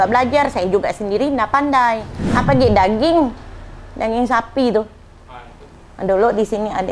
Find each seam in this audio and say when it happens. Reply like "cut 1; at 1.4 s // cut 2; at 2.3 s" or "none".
cut 1; at 2.2 s

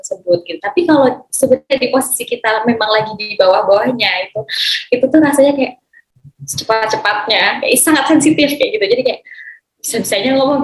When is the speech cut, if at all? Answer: none

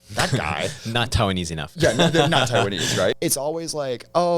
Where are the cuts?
cut 1; at 3.2 s

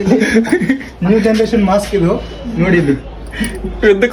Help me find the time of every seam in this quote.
none

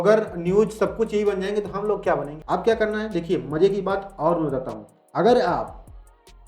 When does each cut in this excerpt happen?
cut 1; at 2.3 s

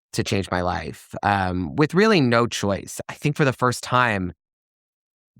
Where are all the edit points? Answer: cut 1; at 2.9 s

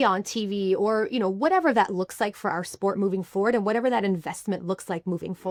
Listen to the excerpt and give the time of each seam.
none

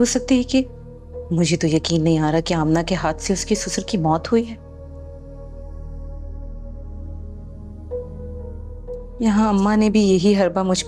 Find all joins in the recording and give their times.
none

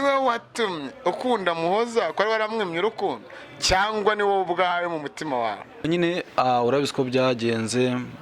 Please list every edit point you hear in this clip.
cut 1; at 5.9 s

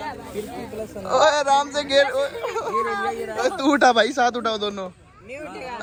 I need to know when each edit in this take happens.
none

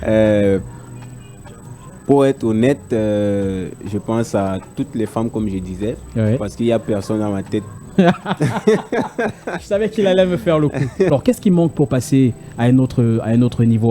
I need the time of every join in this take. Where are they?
cut 1; at 11.1 s

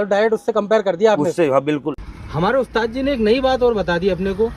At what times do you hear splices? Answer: cut 1; at 2.0 s

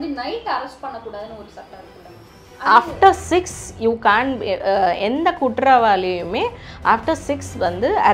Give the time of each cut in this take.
none

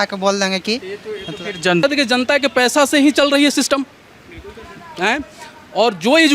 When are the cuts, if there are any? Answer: cut 1; at 1.8 s

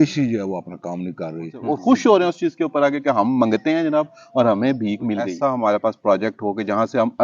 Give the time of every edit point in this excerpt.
cut 1; at 1.5 s // cut 2; at 5.3 s

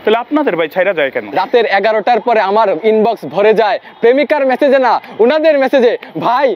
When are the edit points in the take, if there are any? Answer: cut 1; at 1.2 s

